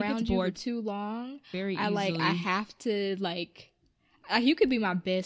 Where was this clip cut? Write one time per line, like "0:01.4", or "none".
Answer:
none